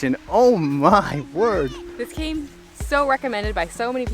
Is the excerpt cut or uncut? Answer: cut